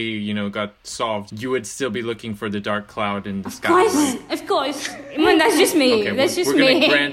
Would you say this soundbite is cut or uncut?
uncut